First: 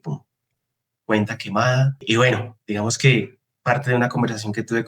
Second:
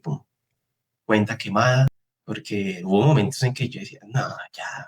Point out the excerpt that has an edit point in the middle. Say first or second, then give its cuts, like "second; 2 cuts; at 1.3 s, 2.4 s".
second; 1 cut; at 2.0 s